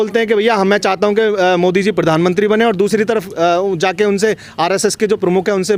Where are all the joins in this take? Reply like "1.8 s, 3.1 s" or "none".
none